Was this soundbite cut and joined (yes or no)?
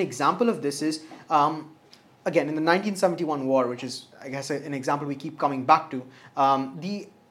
no